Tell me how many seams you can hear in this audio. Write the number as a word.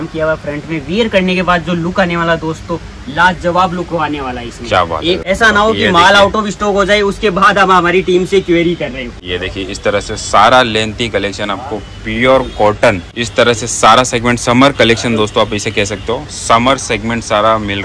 three